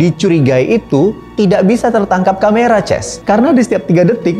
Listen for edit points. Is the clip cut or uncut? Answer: uncut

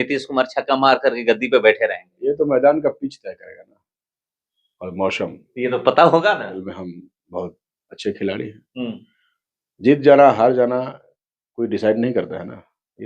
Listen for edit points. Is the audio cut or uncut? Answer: cut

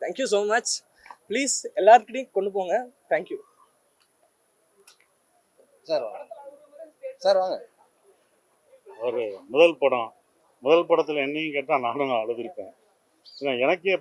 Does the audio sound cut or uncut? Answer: uncut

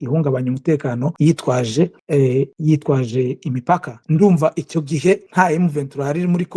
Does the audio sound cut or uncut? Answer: cut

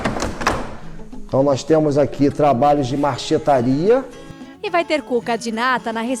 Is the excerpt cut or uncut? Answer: cut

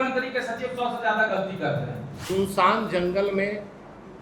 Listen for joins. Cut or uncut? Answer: cut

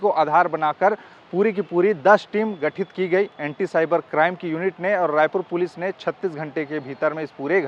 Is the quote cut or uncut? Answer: uncut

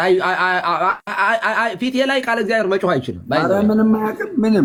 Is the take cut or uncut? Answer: uncut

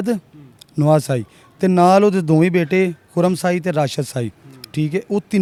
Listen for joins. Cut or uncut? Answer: uncut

